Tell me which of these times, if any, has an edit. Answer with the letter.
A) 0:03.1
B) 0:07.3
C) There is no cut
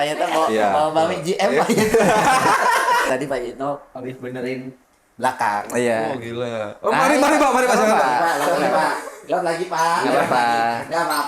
A